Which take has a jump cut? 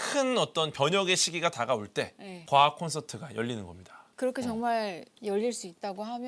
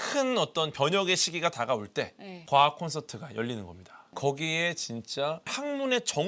second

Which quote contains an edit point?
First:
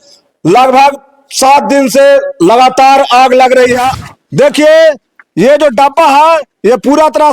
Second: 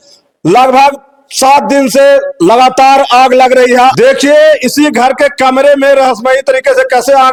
first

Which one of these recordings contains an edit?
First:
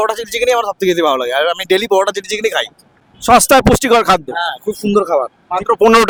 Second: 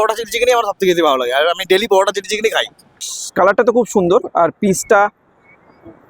second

